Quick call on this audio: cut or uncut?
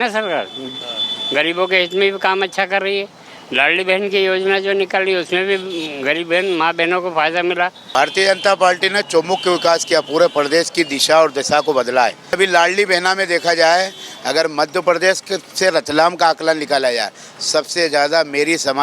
cut